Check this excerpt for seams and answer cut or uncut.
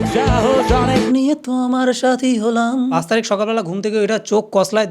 cut